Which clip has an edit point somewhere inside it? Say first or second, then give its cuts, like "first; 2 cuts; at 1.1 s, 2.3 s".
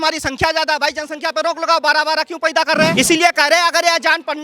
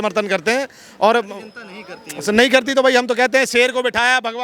first; 1 cut; at 2.9 s